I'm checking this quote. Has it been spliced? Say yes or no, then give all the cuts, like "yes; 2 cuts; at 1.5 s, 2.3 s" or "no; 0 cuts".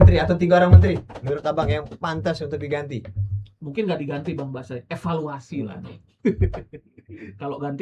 no; 0 cuts